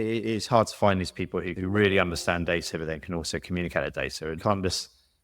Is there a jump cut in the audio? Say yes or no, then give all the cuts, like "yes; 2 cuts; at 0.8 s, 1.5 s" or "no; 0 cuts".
yes; 2 cuts; at 1.5 s, 4.4 s